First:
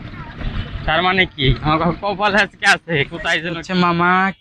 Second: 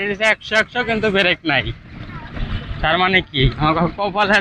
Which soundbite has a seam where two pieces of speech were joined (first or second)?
first